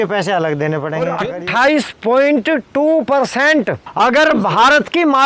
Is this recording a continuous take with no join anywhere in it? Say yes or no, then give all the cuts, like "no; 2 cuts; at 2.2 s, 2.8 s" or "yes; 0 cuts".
no; 1 cut; at 1.2 s